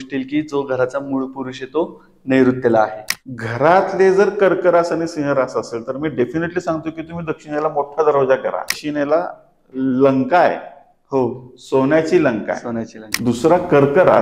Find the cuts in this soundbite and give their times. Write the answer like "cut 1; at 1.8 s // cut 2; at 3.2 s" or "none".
cut 1; at 3.0 s // cut 2; at 8.8 s // cut 3; at 13.0 s